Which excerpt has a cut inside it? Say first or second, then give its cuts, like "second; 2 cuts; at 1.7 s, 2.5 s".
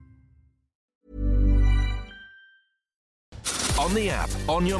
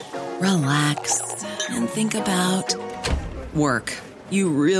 first; 2 cuts; at 0.9 s, 3.2 s